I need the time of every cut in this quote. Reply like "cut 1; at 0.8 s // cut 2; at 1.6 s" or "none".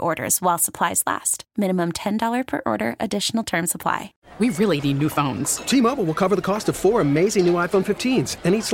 cut 1; at 4.2 s